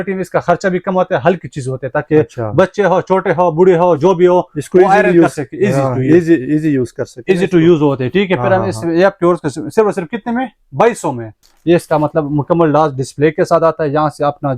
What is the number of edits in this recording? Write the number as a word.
one